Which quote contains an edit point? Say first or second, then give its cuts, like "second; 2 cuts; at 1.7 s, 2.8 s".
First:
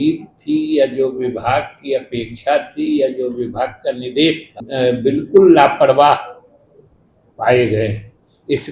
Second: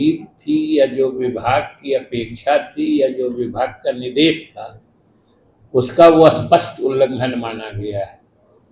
first; 1 cut; at 4.5 s